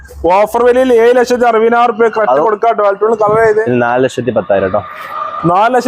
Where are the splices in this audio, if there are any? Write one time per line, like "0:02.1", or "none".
0:03.6